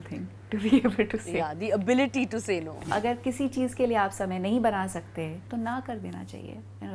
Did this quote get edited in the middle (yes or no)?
yes